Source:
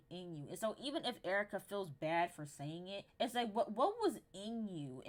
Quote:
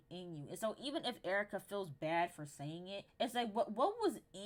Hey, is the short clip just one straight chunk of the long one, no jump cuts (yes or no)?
yes